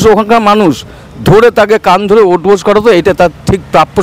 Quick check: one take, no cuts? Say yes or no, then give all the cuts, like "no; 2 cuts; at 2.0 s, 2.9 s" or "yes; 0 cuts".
yes; 0 cuts